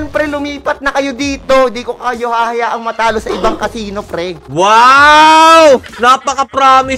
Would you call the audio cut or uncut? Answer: cut